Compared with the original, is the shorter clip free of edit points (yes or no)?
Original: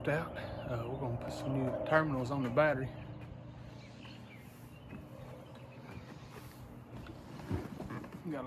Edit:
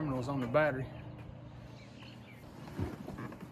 no